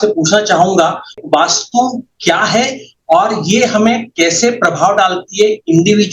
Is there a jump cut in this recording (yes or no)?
yes